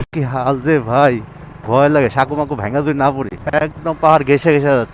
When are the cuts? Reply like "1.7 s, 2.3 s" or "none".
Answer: 3.8 s